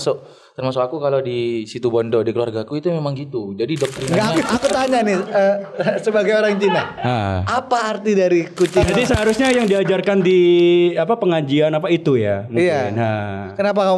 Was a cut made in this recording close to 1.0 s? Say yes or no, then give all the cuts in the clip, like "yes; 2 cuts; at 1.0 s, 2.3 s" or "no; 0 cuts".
no; 2 cuts; at 4.0 s, 8.9 s